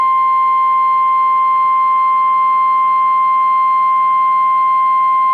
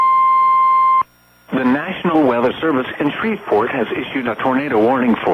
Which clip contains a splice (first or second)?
second